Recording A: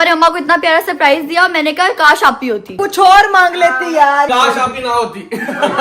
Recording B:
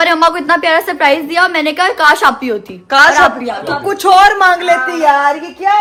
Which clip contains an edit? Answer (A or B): A